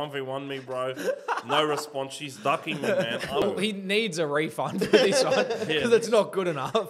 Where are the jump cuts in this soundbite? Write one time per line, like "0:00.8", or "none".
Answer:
0:03.4

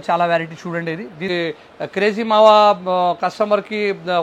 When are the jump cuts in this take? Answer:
0:01.3

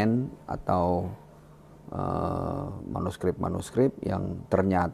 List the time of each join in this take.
none

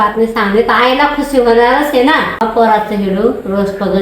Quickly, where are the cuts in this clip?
0:02.4

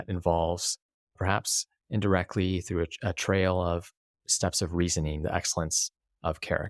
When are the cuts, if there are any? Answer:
none

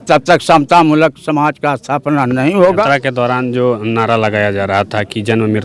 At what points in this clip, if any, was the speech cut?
none

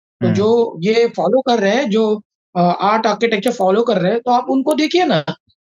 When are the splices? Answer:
none

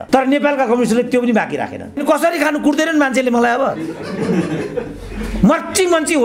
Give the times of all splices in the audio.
0:02.0

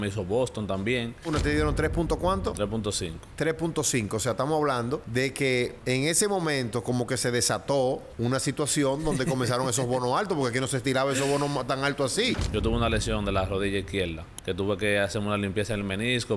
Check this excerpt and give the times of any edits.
0:01.3
0:05.1
0:05.8
0:08.1
0:12.3
0:14.3

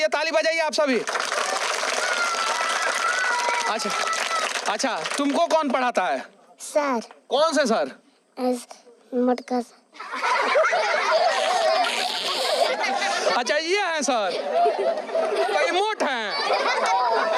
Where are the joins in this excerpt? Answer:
none

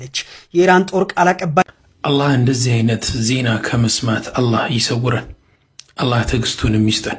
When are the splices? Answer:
0:01.6

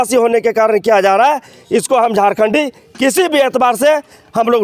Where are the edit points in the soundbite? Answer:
none

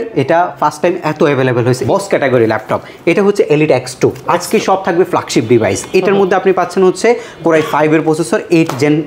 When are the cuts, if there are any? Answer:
0:01.8

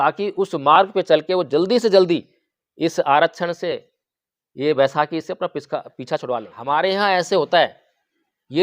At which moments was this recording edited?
0:06.5

